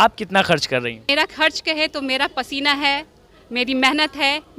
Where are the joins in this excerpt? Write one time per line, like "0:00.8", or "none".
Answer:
0:01.1